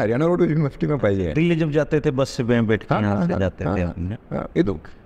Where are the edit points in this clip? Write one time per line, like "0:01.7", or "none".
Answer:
none